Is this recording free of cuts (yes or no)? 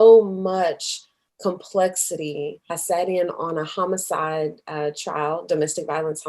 no